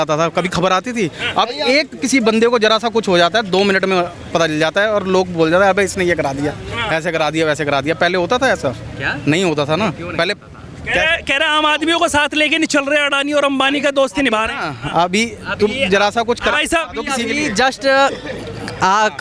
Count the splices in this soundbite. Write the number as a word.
zero